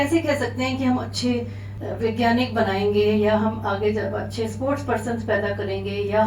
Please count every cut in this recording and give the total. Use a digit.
1